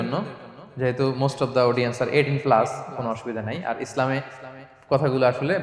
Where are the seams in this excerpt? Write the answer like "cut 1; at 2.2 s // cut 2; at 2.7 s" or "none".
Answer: none